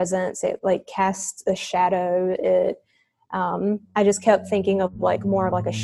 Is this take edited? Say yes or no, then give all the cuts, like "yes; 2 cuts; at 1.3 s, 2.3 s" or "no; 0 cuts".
no; 0 cuts